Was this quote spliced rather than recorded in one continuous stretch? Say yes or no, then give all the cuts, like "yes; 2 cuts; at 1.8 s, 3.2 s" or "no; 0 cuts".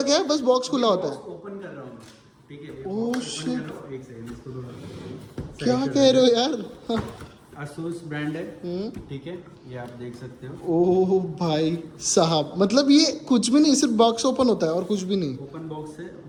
no; 0 cuts